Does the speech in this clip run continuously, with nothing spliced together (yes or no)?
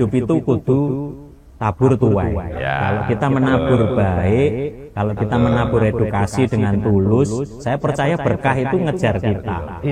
yes